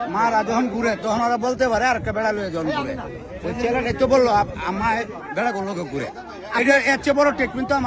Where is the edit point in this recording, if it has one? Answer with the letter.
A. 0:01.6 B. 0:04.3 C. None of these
C